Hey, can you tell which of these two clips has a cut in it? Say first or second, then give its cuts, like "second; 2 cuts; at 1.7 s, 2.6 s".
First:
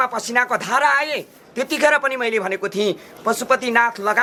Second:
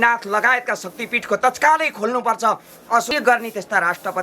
second; 1 cut; at 3.1 s